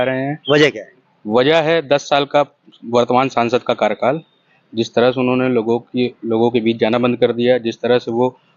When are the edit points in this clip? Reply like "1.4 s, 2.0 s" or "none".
none